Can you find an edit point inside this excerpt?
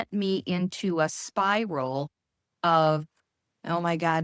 no; 0 cuts

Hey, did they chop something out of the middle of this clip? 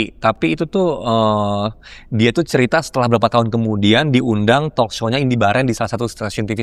no; 0 cuts

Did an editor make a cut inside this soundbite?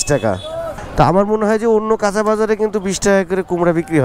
no; 0 cuts

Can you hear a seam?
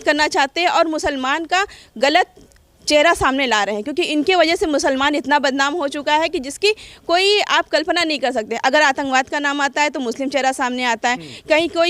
no; 0 cuts

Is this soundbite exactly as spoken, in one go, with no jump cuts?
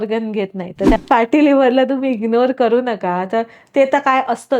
no; 1 cut; at 1.0 s

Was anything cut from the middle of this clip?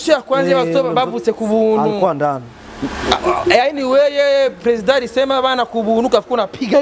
no; 0 cuts

